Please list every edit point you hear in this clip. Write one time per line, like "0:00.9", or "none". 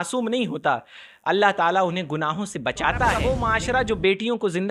0:03.4